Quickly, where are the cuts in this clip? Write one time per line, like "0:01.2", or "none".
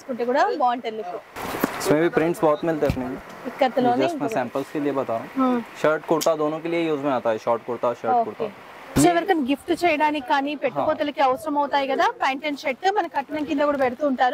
none